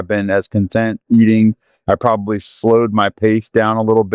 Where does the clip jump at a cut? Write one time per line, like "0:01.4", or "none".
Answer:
none